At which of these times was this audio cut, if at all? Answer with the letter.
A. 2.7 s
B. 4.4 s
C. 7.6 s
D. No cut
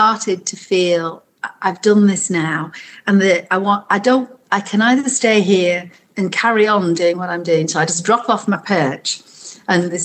D